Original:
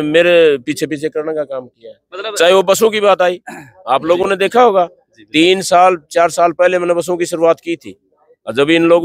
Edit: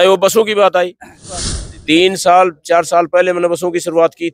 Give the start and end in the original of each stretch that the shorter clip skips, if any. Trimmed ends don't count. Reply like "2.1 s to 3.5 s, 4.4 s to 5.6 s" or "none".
3.9 s to 4.9 s